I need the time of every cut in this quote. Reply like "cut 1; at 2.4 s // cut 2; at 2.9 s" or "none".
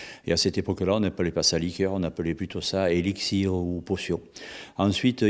cut 1; at 1.1 s